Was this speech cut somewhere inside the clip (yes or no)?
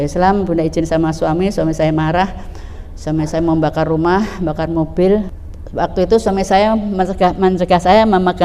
yes